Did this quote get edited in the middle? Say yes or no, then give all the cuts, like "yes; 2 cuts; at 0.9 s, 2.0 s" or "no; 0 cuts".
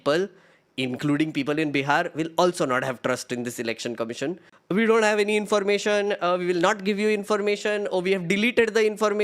yes; 1 cut; at 4.5 s